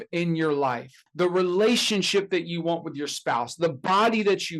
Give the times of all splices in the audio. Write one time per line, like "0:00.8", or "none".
0:01.0

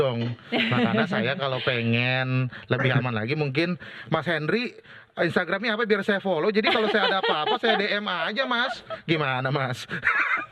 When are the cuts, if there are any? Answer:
none

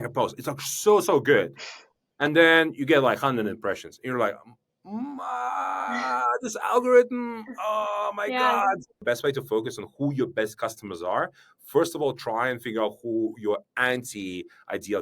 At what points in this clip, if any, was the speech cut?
0:09.0

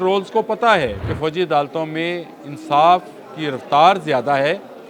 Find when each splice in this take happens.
0:01.1

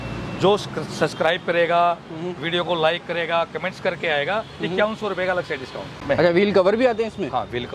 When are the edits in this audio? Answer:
0:05.9

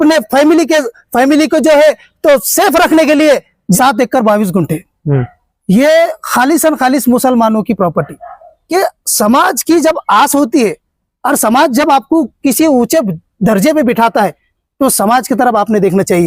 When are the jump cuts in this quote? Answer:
0:03.8
0:08.5

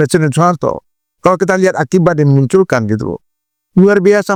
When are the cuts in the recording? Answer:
none

